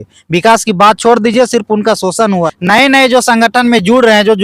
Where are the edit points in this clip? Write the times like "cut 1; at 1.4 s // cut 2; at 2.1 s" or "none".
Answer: cut 1; at 2.5 s